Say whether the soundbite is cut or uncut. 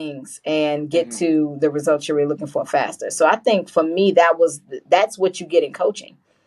uncut